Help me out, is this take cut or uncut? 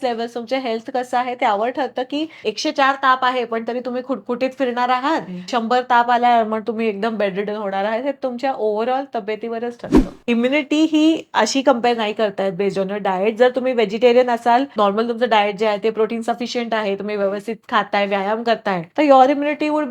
cut